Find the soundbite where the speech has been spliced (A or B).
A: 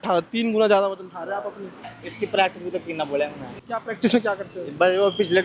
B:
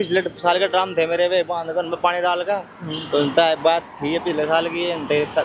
A